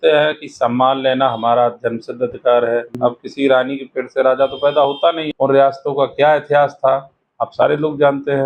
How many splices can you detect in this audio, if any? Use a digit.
2